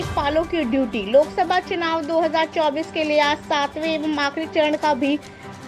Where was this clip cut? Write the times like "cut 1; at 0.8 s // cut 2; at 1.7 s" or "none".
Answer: none